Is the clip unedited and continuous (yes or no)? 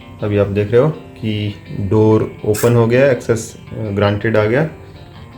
yes